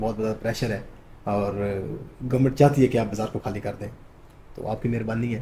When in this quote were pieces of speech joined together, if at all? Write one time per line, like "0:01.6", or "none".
none